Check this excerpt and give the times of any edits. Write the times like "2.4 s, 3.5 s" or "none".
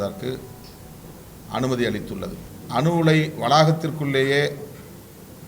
2.5 s